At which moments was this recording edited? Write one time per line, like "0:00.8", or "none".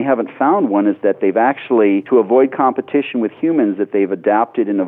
0:02.0